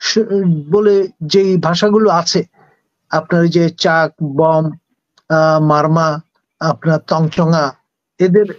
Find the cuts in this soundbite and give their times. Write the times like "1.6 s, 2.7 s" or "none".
none